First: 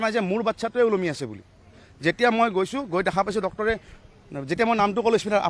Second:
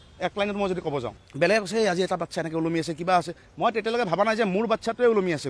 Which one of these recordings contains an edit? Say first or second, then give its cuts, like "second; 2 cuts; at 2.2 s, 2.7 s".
second; 1 cut; at 1.1 s